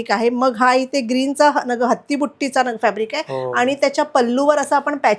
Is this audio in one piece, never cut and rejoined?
yes; 0 cuts

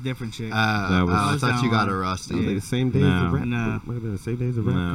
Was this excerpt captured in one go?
yes; 0 cuts

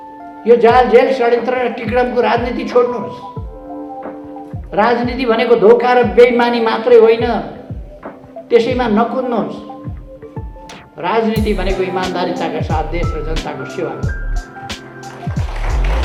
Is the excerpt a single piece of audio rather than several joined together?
yes; 0 cuts

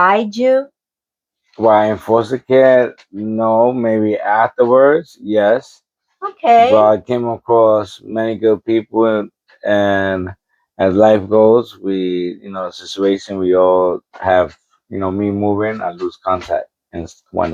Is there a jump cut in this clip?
no; 0 cuts

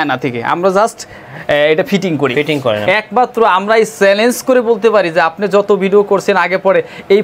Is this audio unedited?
no; 1 cut; at 2.9 s

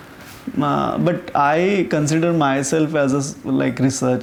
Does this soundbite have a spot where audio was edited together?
no; 0 cuts

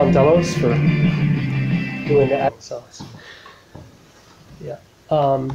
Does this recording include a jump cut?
no; 0 cuts

